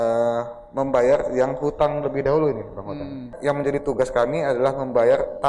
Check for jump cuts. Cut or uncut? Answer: cut